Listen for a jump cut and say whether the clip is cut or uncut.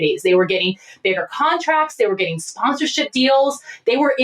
uncut